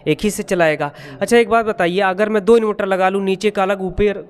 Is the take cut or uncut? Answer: uncut